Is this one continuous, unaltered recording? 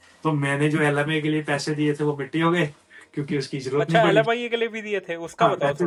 yes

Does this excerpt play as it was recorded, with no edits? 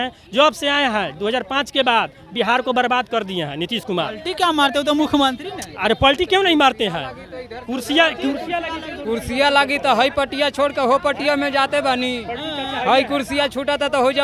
yes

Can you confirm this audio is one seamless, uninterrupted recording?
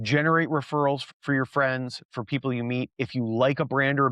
no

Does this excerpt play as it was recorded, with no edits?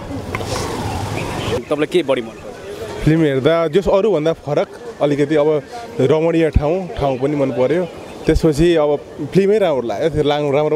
no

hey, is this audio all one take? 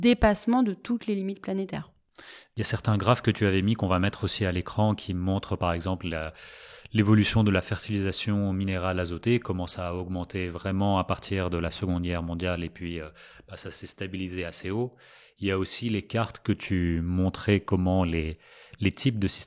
yes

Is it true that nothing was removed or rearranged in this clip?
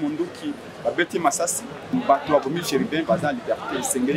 no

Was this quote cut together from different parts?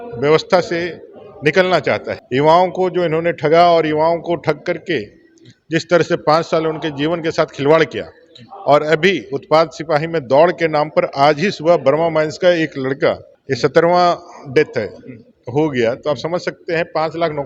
no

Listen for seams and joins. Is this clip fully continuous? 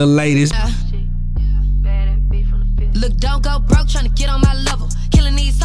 yes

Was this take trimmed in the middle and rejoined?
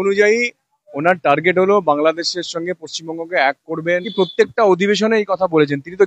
yes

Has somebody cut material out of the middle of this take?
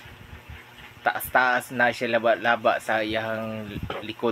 no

